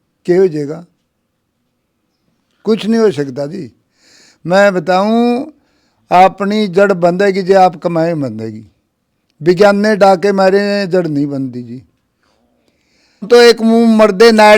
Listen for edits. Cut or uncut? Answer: cut